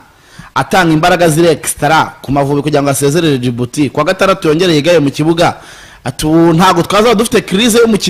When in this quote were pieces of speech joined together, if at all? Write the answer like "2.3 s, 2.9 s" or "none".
none

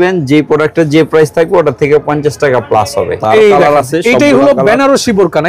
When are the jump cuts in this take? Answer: 3.2 s

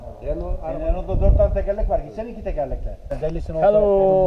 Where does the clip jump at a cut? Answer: 3.1 s

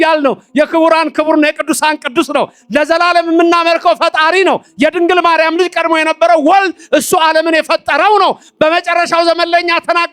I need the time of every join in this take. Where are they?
none

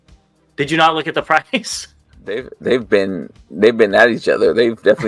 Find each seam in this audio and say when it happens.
2.5 s

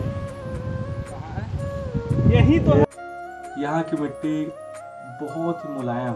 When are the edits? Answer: 2.8 s

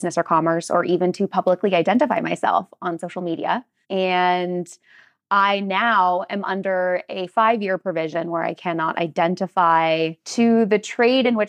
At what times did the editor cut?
3.7 s, 10.2 s

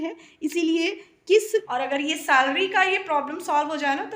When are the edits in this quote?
1.7 s

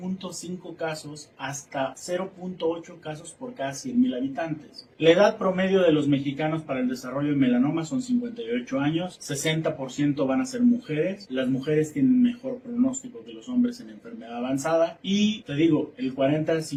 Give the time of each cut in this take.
none

